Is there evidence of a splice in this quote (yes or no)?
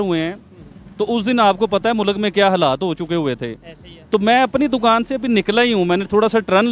no